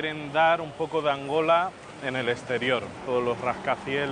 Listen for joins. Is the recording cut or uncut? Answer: uncut